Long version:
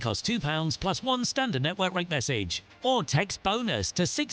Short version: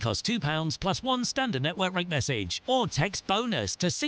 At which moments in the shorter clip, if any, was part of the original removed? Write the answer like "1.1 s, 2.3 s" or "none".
2.5 s